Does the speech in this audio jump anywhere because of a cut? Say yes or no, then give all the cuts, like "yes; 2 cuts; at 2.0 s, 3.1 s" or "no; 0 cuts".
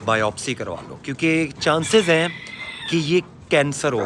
no; 0 cuts